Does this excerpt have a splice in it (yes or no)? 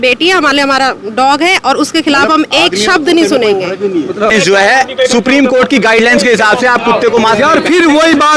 yes